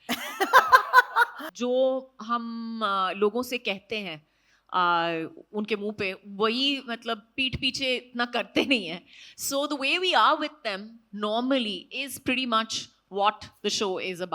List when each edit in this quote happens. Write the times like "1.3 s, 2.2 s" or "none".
1.5 s

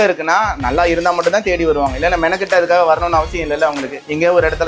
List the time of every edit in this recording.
none

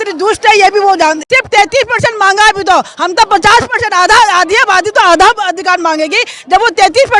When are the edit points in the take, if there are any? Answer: 1.2 s

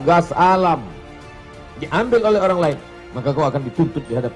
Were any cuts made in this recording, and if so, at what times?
none

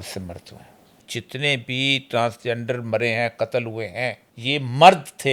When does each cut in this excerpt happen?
1.0 s, 4.3 s

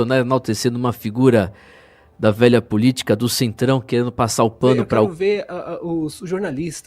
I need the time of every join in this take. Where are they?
5.1 s

